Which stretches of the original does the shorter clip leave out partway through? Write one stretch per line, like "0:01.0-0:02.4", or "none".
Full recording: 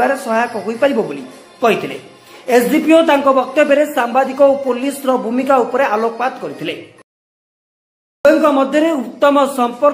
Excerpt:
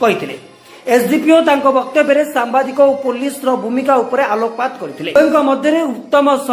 0:06.6-0:08.1